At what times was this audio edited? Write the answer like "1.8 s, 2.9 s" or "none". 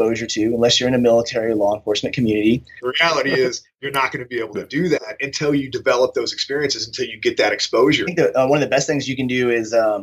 2.8 s, 8.1 s